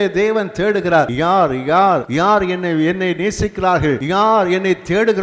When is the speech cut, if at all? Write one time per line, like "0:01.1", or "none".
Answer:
0:01.1
0:02.1
0:04.0